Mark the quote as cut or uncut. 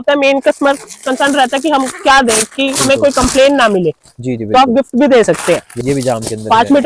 cut